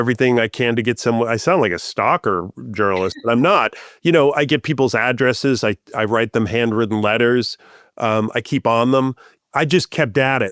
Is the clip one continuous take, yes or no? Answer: no